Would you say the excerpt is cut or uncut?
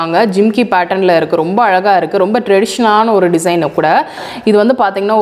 cut